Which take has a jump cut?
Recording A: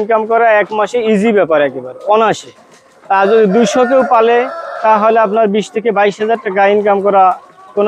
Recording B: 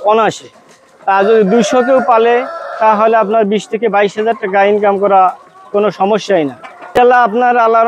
B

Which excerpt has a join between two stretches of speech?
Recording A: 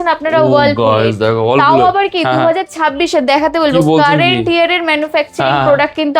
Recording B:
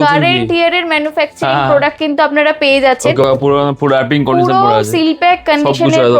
B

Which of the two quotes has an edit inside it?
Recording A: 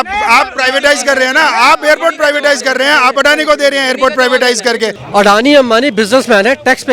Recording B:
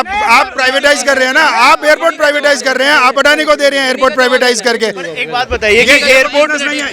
A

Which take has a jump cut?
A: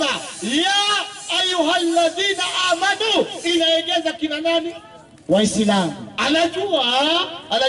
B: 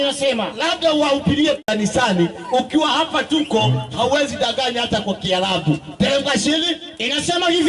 B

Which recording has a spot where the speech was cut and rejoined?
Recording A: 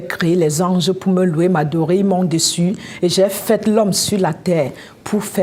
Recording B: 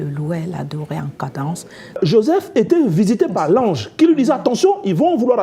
B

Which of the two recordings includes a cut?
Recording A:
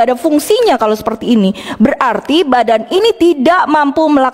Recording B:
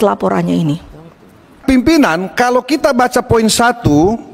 B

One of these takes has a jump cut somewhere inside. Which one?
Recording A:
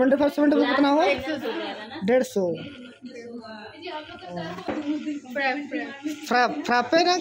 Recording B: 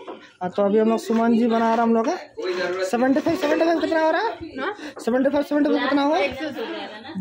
A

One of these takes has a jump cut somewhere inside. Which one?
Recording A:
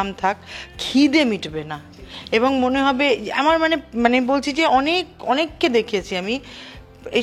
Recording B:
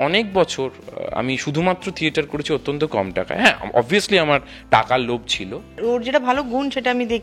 B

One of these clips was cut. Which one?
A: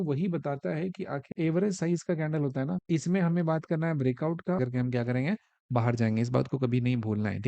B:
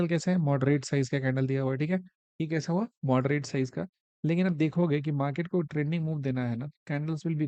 A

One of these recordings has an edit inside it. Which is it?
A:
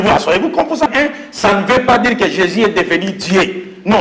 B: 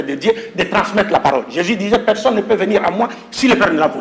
A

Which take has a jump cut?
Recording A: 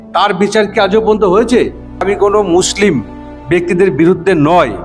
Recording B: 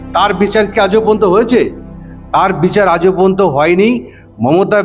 A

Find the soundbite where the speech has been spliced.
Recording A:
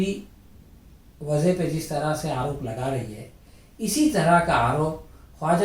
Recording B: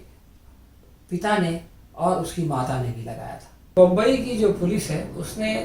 B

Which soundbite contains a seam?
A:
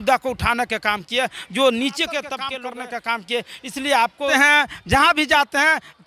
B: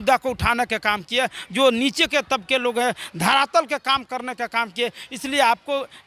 A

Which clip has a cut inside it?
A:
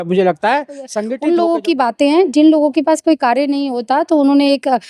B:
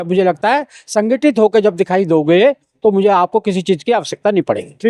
A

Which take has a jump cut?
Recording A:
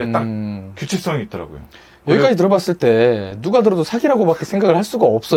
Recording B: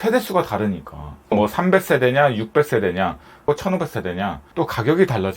B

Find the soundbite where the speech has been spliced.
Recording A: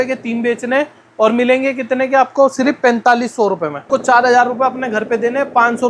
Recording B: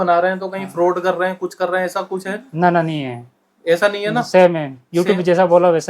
A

